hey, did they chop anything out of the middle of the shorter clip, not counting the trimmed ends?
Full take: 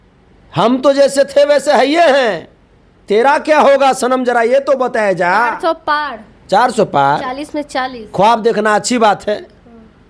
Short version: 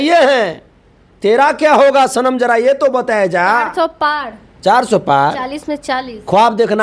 no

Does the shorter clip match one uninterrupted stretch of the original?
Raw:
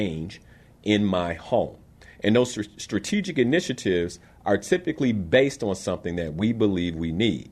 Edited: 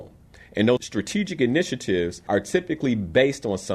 no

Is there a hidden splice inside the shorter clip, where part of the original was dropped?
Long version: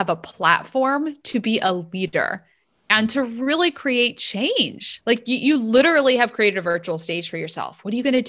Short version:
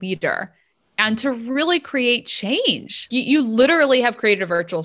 yes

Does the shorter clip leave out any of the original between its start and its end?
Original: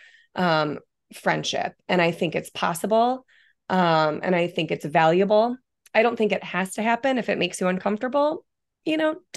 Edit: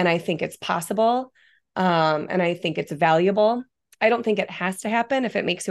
no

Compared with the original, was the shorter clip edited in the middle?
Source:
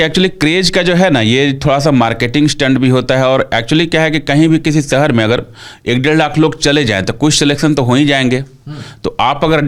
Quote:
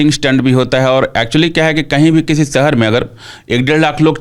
no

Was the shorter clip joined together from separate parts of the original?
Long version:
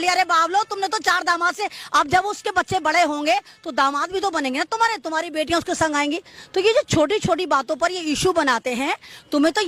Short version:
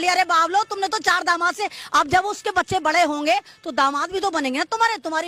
no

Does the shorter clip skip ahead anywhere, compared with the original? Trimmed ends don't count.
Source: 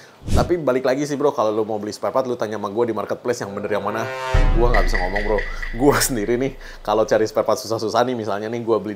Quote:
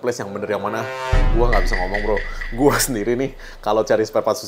no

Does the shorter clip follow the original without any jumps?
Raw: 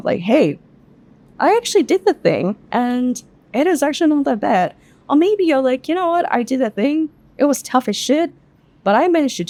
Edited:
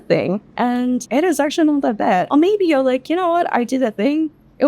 no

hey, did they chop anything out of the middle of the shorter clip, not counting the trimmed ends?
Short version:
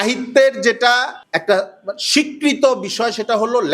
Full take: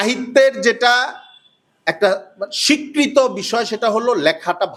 yes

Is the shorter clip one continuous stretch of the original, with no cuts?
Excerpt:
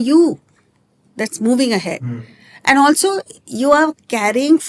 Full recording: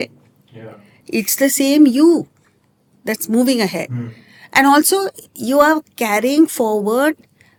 yes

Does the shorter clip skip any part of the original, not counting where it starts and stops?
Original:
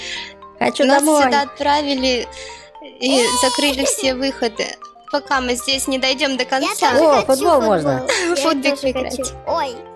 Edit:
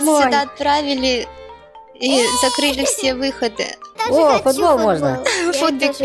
yes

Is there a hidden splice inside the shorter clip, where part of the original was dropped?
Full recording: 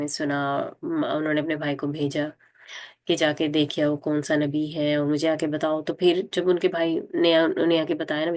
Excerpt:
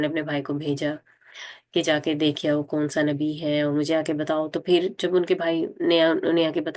no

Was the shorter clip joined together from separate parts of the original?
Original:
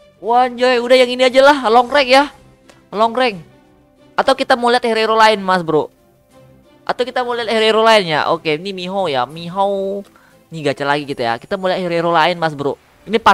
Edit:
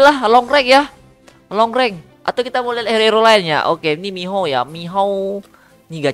yes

